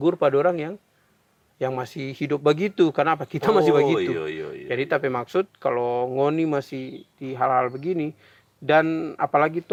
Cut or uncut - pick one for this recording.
uncut